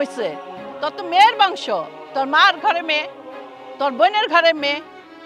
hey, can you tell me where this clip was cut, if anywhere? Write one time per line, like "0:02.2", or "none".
none

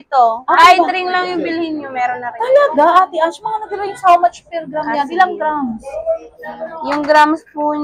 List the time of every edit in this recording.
none

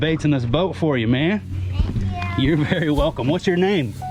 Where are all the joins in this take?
none

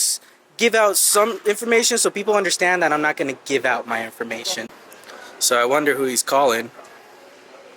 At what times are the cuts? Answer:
0:04.7

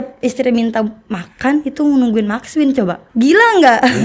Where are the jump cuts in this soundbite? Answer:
0:03.0

